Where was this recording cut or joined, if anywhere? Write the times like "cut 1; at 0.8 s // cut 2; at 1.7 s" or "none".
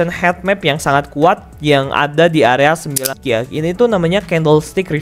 cut 1; at 3.0 s